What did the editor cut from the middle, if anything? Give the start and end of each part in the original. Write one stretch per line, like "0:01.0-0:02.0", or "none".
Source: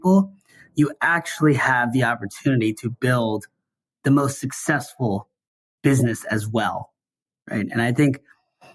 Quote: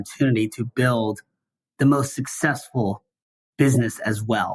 none